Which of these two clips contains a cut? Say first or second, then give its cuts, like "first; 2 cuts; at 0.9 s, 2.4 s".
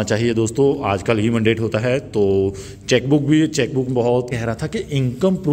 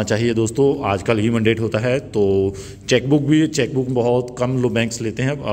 first; 1 cut; at 4.3 s